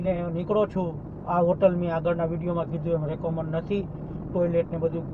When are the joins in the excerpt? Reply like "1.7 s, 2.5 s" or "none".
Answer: none